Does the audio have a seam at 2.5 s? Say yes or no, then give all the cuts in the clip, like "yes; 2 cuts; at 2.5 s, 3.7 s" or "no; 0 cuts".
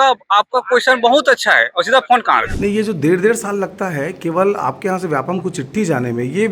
yes; 1 cut; at 2.5 s